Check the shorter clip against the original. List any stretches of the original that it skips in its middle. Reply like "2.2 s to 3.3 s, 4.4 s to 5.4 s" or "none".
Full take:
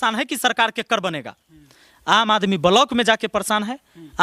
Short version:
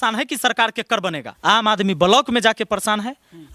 1.3 s to 1.9 s

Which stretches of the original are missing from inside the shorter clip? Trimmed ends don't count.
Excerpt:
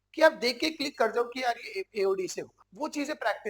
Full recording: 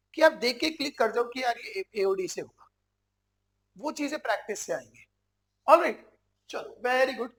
2.6 s to 3.6 s

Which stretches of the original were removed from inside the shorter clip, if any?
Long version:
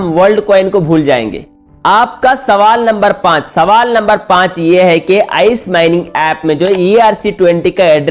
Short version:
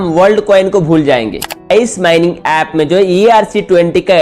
1.6 s to 5.3 s

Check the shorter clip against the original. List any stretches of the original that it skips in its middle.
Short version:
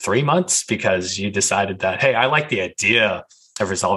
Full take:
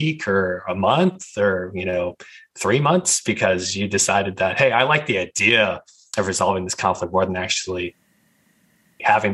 none

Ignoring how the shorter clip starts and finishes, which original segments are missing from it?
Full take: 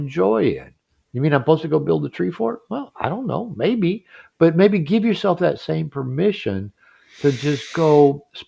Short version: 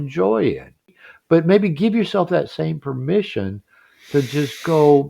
1.0 s to 4.1 s

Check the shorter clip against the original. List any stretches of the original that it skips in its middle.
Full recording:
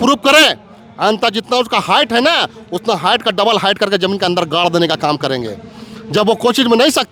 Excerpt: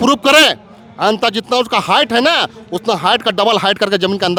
none

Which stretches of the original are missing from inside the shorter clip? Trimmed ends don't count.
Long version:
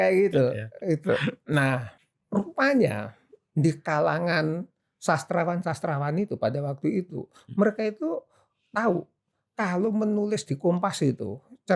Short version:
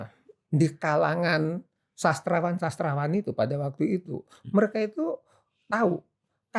none

